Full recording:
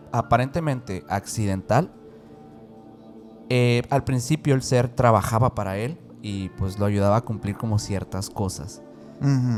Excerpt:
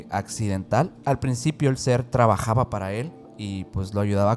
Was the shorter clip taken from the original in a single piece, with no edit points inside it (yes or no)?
no